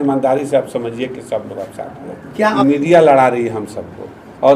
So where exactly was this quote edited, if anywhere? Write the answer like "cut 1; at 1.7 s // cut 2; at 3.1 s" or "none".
cut 1; at 2.6 s